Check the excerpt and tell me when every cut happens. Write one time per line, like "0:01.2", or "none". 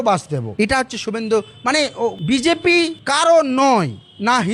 none